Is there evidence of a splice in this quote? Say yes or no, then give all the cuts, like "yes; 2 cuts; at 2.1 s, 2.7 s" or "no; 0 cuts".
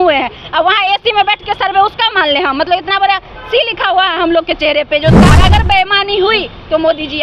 yes; 1 cut; at 5.3 s